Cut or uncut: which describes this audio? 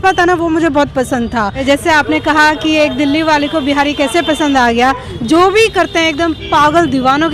cut